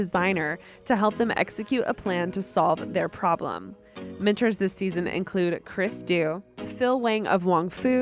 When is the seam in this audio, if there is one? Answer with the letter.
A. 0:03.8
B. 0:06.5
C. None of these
B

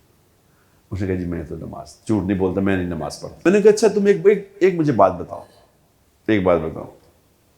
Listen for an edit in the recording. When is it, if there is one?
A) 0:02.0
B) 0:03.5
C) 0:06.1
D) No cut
B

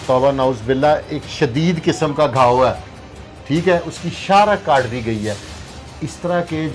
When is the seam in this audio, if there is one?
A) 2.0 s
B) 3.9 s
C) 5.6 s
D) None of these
D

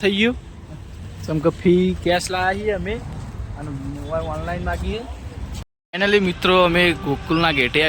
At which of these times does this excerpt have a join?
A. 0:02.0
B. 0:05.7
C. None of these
B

